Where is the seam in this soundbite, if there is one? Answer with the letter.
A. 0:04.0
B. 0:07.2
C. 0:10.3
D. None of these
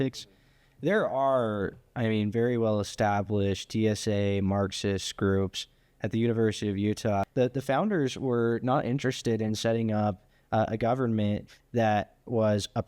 B